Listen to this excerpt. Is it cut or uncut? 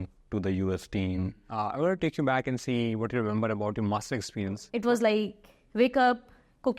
cut